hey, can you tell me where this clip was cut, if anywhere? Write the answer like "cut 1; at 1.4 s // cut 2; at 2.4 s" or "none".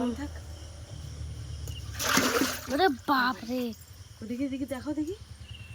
none